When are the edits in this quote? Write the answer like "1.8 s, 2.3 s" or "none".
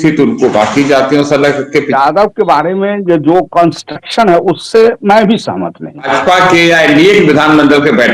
1.9 s, 6.1 s